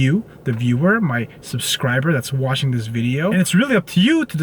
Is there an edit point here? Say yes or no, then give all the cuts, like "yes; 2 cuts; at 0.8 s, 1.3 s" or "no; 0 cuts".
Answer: yes; 1 cut; at 3.3 s